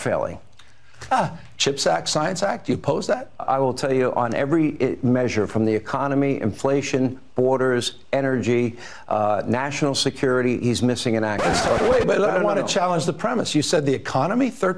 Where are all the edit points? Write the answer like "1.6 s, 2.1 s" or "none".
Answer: 3.4 s, 11.6 s